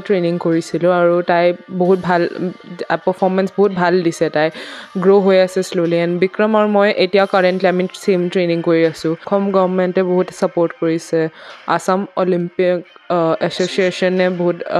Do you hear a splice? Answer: yes; 1 cut; at 9.3 s

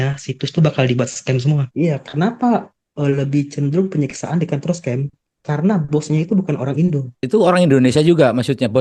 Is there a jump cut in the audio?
yes; 2 cuts; at 1.7 s, 7.1 s

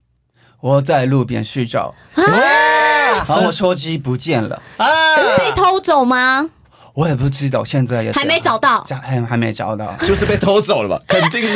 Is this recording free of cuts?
yes; 0 cuts

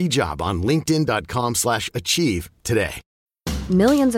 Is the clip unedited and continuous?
no; 1 cut; at 3.0 s

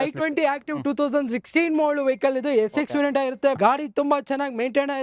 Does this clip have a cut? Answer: yes; 1 cut; at 3.6 s

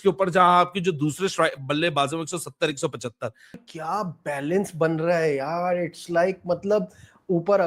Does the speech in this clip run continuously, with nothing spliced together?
no; 1 cut; at 3.7 s

